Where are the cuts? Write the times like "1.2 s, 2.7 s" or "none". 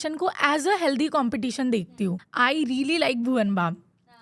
2.3 s